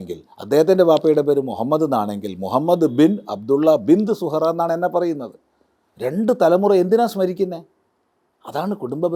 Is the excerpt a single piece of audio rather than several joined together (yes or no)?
yes